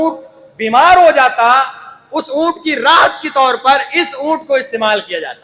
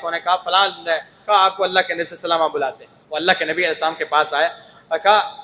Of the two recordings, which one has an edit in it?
second; 1 cut; at 2.9 s

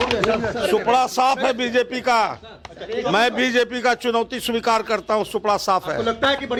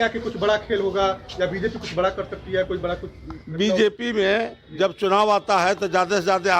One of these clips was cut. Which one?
second; 1 cut; at 5.0 s

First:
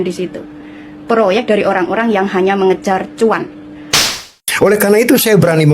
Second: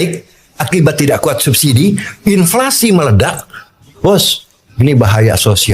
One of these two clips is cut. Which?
first; 1 cut; at 4.4 s

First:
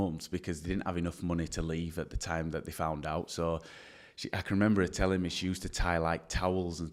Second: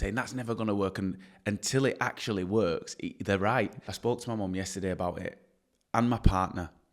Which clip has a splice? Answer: second; 1 cut; at 3.9 s

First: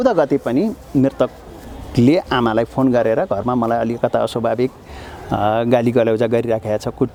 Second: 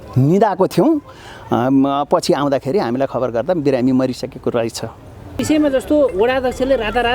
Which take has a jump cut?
second; 1 cut; at 5.4 s

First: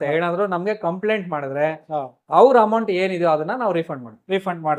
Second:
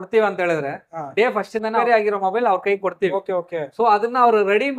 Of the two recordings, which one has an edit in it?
second; 1 cut; at 1.6 s

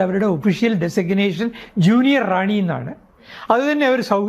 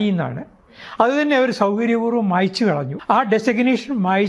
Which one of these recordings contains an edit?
second; 1 cut; at 2.9 s

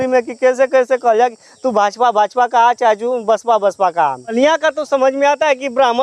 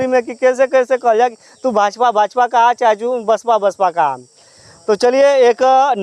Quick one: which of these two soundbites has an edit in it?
first; 1 cut; at 4.3 s

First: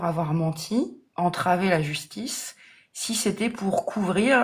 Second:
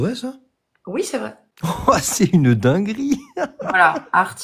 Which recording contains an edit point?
second; 1 cut; at 1.4 s

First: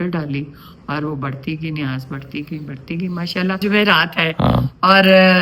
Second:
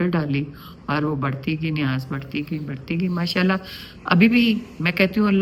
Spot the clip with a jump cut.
first; 1 cut; at 3.6 s

